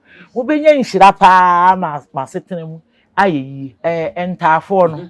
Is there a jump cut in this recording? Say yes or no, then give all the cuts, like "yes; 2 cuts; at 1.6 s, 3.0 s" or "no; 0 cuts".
yes; 1 cut; at 3.7 s